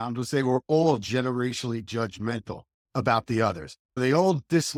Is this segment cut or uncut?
uncut